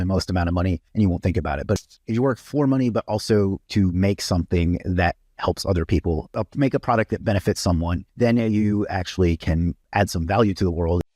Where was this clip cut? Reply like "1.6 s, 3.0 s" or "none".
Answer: 0.8 s, 1.8 s, 3.6 s, 6.3 s, 8.0 s, 9.8 s